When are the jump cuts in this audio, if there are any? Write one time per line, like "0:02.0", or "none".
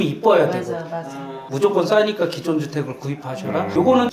0:01.5